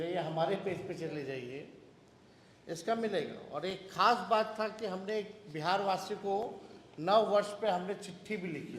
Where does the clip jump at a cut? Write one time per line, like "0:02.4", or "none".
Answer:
0:06.4